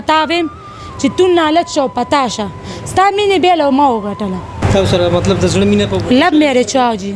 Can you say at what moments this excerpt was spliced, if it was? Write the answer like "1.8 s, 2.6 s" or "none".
4.6 s